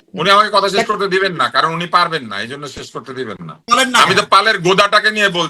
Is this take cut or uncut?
cut